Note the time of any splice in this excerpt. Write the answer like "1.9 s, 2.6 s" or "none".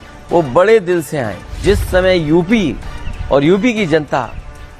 1.6 s